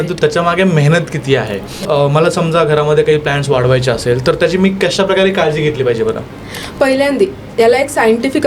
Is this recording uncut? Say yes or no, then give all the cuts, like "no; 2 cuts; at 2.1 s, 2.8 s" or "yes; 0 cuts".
no; 1 cut; at 1.9 s